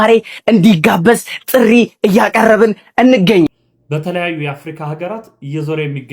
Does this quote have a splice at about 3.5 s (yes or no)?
yes